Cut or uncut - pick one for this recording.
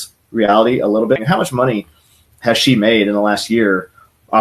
cut